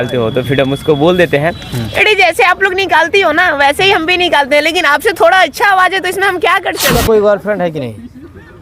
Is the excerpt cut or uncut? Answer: cut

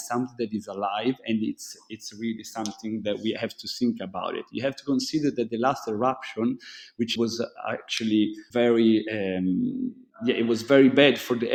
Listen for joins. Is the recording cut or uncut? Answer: uncut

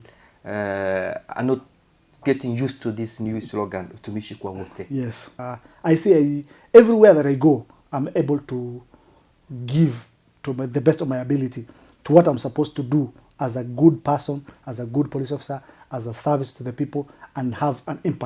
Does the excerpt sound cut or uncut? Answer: cut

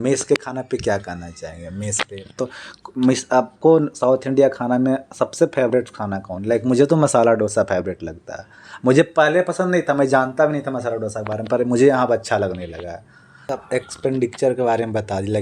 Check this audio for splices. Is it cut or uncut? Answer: cut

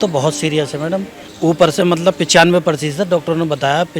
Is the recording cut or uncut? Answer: cut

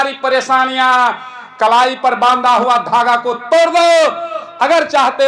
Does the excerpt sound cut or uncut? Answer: uncut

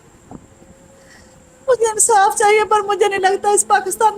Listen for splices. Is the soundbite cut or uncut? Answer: uncut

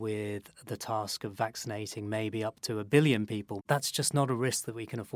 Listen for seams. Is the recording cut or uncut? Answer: cut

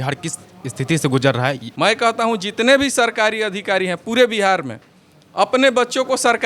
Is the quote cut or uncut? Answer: cut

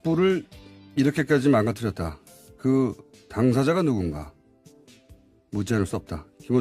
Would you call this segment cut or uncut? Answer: cut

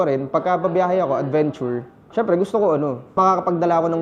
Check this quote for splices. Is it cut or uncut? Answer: cut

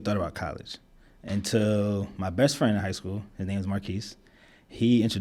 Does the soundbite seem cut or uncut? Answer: uncut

